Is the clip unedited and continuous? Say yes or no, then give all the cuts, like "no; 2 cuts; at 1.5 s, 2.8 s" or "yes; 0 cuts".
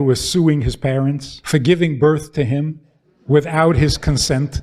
no; 1 cut; at 1.3 s